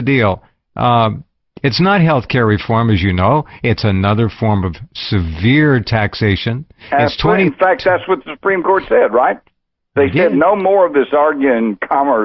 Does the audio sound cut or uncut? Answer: uncut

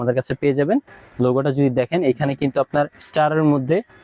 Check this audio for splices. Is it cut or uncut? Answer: uncut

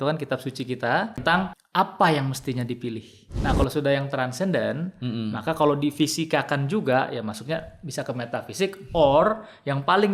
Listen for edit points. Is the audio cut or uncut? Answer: cut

